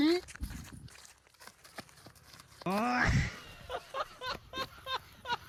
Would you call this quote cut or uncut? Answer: uncut